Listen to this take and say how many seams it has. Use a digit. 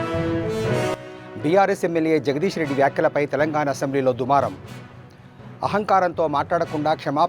1